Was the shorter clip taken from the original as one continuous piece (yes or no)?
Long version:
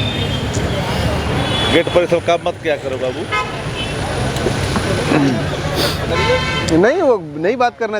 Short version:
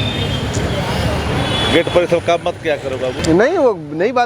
no